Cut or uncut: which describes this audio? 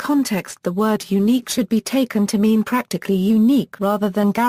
uncut